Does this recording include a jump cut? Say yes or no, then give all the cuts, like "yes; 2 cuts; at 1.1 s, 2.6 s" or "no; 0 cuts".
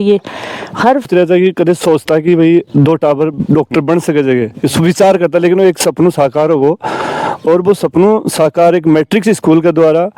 yes; 1 cut; at 1.1 s